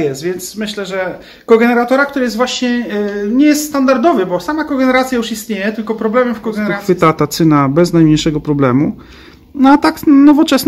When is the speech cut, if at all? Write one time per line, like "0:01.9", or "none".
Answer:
0:06.8